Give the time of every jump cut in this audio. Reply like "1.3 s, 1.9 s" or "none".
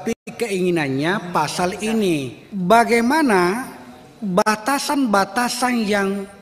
2.4 s